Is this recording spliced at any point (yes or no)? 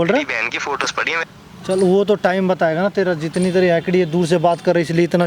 no